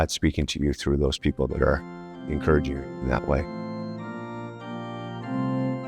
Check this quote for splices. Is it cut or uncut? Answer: cut